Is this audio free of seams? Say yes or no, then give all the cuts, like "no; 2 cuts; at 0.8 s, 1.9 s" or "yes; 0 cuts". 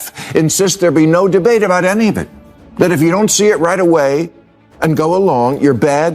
no; 1 cut; at 2.6 s